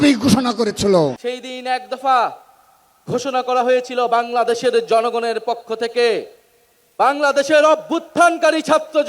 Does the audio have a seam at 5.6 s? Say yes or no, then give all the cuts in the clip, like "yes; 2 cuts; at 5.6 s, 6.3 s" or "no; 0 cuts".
no; 1 cut; at 1.2 s